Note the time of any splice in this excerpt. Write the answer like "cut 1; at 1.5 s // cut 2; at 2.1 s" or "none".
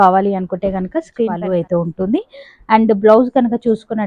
cut 1; at 1.4 s